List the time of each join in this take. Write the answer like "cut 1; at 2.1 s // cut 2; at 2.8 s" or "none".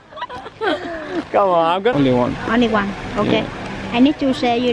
cut 1; at 1.9 s